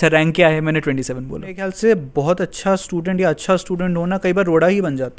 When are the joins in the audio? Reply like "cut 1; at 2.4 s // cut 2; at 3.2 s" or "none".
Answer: cut 1; at 1.7 s